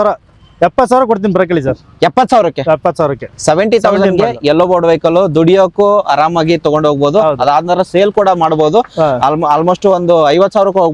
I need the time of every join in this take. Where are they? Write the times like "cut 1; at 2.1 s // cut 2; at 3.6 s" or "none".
none